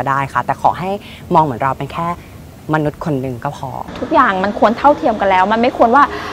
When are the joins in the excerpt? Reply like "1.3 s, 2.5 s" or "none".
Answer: 3.8 s